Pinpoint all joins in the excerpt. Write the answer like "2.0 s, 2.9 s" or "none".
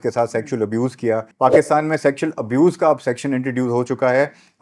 1.3 s